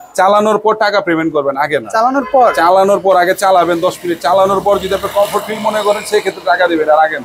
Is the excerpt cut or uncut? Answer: uncut